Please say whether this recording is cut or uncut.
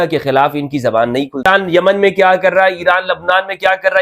cut